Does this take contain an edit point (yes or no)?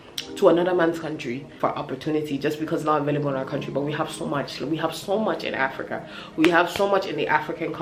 no